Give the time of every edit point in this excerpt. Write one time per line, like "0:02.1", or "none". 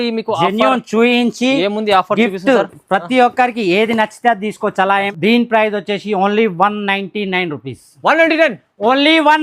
0:05.0